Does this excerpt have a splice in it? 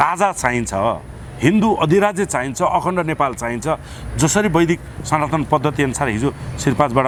no; 0 cuts

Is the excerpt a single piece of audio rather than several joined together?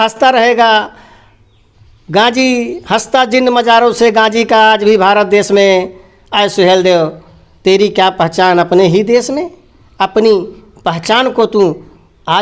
yes; 0 cuts

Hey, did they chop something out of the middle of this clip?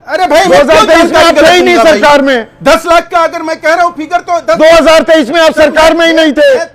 no; 0 cuts

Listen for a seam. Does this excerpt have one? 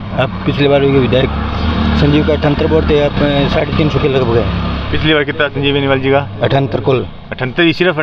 no; 0 cuts

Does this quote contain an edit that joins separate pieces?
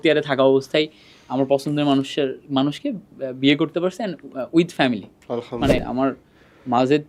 yes; 1 cut; at 5.8 s

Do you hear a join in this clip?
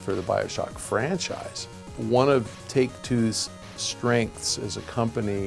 yes; 1 cut; at 1.9 s

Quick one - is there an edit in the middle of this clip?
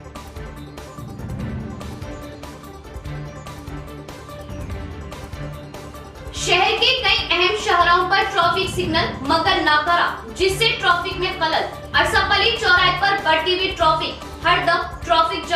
no; 0 cuts

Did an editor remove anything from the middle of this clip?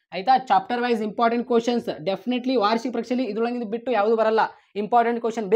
no; 0 cuts

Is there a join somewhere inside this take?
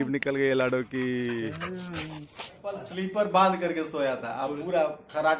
yes; 1 cut; at 2.8 s

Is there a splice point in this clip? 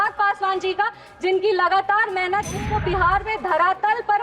yes; 1 cut; at 2.7 s

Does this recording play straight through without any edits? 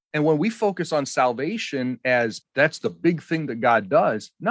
no; 1 cut; at 2.4 s

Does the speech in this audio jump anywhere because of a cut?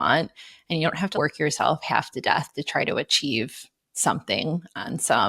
yes; 1 cut; at 1.1 s

